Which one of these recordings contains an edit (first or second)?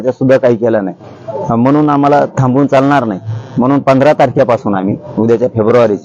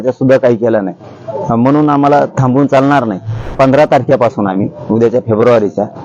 second